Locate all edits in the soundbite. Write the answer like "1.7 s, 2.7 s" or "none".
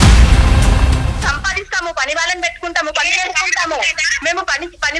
1.1 s

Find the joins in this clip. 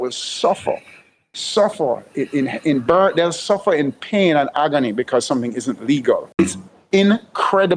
6.4 s

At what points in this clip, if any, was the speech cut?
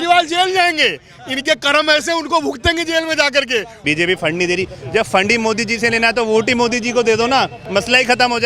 3.7 s

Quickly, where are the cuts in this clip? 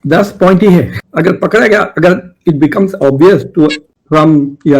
1.0 s

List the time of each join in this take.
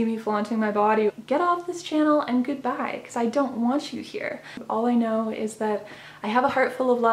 1.1 s, 4.6 s

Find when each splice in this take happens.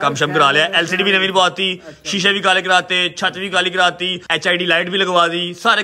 4.4 s

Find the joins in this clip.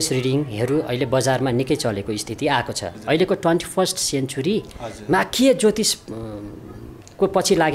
2.9 s

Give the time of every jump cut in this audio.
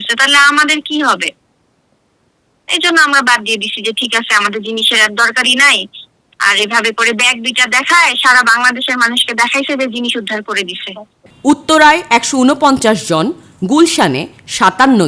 11.2 s

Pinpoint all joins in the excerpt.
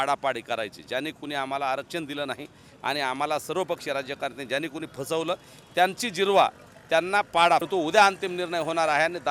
7.7 s

